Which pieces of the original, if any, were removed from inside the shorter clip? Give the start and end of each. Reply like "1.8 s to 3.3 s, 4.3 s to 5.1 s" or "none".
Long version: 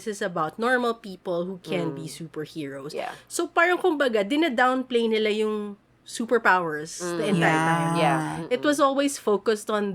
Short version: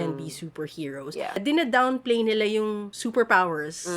3.2 s to 4.3 s, 5.8 s to 6.1 s